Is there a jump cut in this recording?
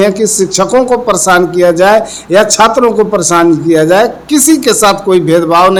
no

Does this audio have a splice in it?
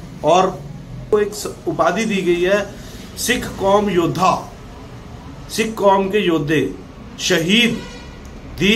yes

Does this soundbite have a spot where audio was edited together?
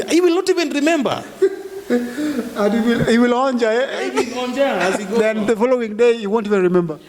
no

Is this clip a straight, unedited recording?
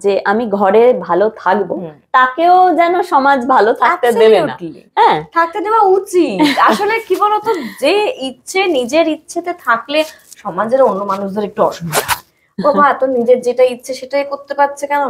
yes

